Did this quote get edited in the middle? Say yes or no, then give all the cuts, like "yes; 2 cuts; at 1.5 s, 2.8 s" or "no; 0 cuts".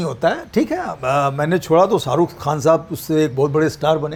no; 0 cuts